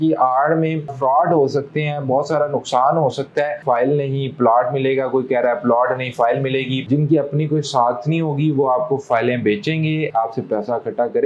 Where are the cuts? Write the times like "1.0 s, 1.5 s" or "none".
1.0 s, 3.6 s, 6.8 s